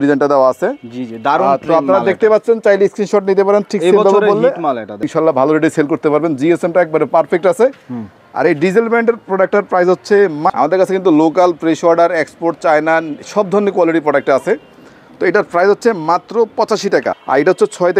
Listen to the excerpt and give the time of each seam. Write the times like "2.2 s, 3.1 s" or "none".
5.1 s, 10.5 s, 17.1 s